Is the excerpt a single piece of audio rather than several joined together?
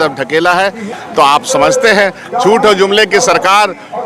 no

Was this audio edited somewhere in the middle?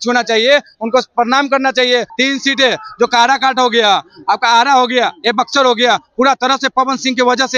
yes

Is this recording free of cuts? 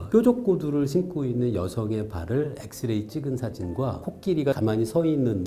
yes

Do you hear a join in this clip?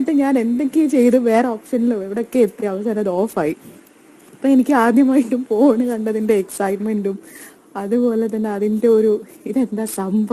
yes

